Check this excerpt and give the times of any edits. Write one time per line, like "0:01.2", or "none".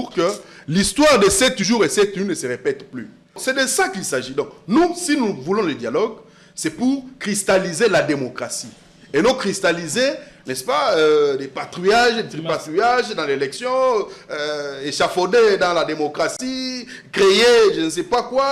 0:03.4